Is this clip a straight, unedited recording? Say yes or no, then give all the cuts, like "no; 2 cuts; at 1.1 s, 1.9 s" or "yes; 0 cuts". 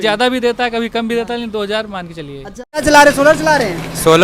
no; 1 cut; at 2.8 s